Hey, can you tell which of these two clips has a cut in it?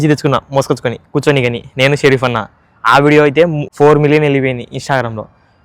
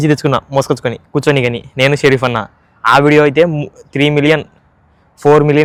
first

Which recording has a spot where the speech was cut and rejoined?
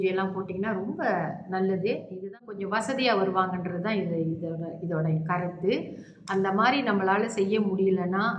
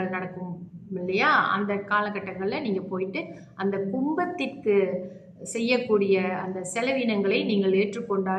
first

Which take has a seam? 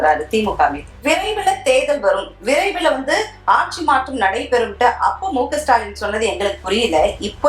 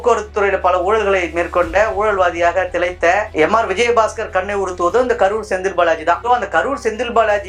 first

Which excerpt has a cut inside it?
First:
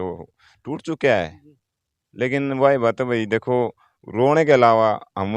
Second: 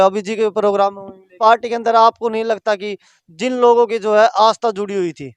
second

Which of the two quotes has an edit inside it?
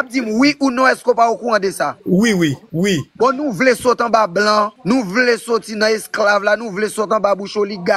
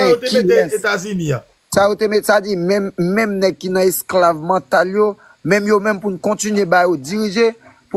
first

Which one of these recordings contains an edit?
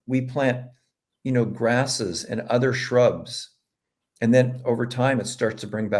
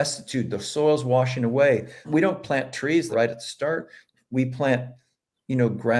second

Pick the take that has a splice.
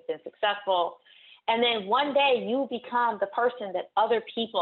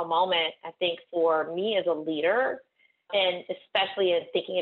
second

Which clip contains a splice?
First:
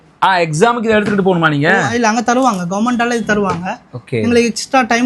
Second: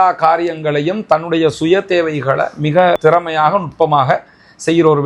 second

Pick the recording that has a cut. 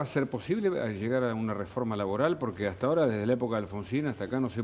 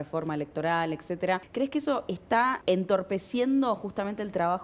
second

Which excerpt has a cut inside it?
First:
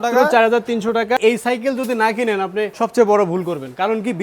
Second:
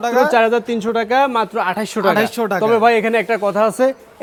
first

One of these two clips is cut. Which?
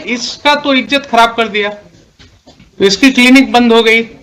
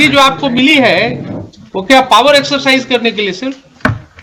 first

